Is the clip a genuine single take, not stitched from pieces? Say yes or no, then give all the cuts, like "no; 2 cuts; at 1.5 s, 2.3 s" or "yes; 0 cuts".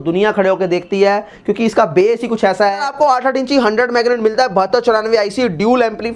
no; 1 cut; at 2.8 s